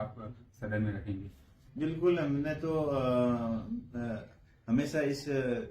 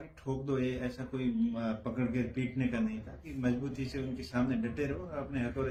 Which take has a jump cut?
first; 1 cut; at 1.7 s

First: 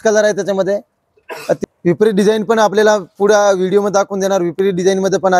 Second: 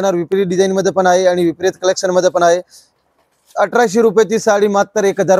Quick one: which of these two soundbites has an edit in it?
first; 1 cut; at 1.6 s

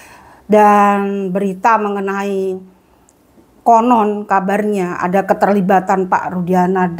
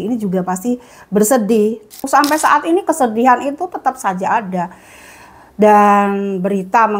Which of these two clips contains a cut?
second; 1 cut; at 2.0 s

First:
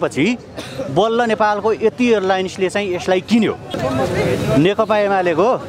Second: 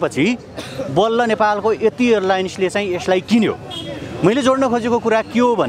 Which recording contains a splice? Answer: first; 1 cut; at 3.7 s

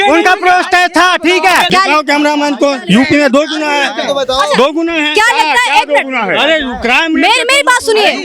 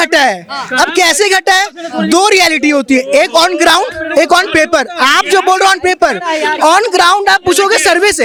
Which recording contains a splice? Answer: first; 1 cut; at 1.7 s

